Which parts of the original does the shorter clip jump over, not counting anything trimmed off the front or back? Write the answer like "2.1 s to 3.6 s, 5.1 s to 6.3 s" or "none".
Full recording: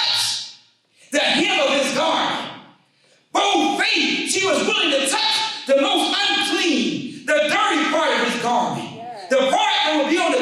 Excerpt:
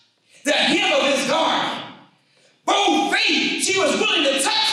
none